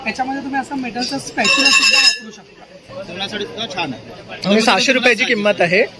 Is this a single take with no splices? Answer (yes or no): no